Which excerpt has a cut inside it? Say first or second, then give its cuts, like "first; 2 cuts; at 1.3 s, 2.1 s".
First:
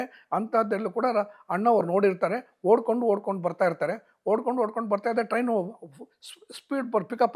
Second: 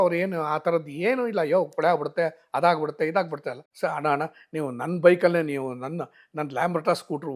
second; 1 cut; at 3.6 s